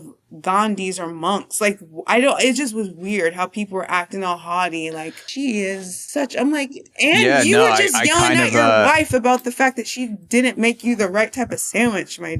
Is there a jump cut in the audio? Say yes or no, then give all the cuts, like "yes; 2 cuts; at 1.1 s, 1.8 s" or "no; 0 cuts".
no; 0 cuts